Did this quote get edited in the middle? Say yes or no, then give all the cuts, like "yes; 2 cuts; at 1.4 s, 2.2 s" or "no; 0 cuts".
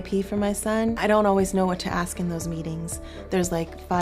yes; 1 cut; at 0.9 s